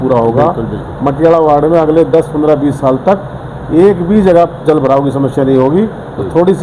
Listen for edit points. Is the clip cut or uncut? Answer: uncut